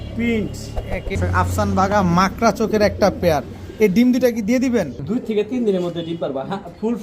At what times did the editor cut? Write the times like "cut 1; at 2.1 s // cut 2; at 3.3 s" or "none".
cut 1; at 1.2 s // cut 2; at 5.0 s